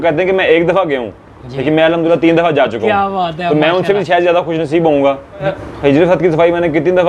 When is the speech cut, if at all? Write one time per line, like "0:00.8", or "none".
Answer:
0:05.6